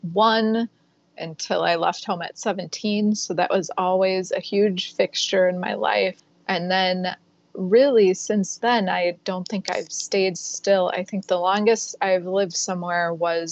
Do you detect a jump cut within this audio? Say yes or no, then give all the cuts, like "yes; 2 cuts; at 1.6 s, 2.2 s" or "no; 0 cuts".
yes; 1 cut; at 6.3 s